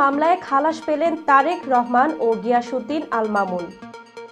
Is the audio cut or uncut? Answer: uncut